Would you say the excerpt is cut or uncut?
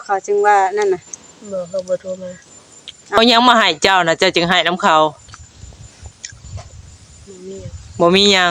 cut